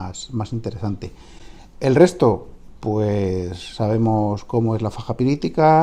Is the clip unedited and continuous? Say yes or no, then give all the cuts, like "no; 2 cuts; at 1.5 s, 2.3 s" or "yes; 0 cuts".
yes; 0 cuts